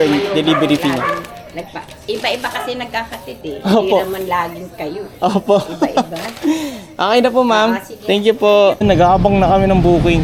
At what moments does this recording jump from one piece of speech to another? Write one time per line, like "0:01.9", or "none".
none

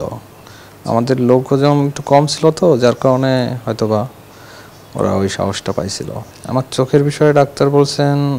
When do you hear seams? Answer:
0:06.3

